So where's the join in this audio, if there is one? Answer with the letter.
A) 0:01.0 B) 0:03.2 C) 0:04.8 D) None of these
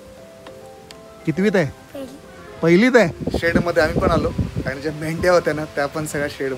B